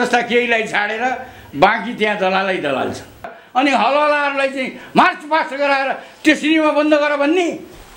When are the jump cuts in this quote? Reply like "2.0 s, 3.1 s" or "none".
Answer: 3.4 s